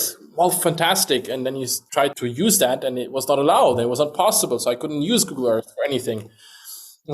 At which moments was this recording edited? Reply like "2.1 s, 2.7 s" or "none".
1.9 s